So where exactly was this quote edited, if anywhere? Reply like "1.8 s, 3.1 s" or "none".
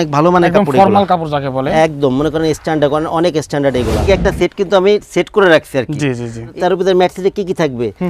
4.0 s, 6.5 s

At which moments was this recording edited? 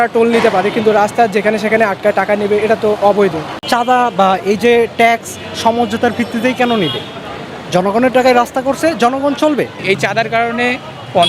3.5 s, 9.8 s

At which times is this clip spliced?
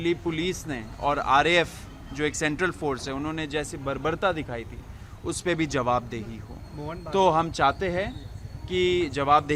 none

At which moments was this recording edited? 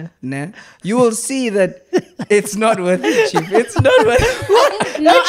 none

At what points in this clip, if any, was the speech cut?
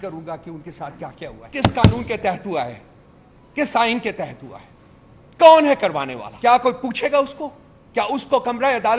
1.4 s, 6.2 s

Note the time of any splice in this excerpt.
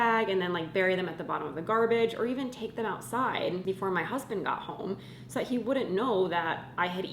3.6 s

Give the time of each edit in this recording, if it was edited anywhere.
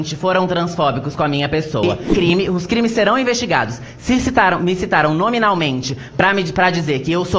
2.0 s

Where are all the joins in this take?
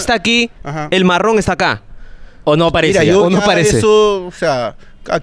none

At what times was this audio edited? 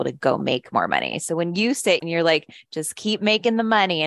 2.0 s

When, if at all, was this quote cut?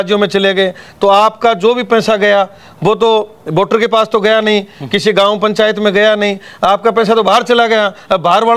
none

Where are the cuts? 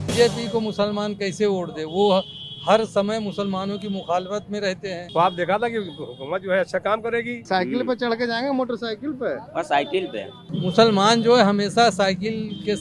5.0 s, 7.5 s, 10.4 s

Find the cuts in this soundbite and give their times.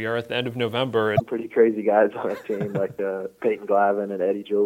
1.3 s

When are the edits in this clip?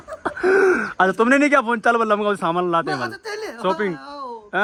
none

